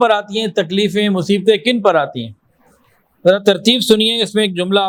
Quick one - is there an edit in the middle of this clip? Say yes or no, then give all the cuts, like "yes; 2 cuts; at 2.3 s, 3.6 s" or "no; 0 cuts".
no; 0 cuts